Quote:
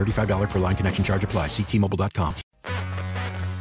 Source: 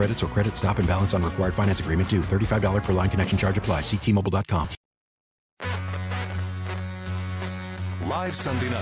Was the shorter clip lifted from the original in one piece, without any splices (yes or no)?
no